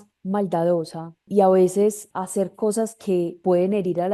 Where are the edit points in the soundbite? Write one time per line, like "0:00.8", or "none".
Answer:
0:01.2
0:02.1
0:03.4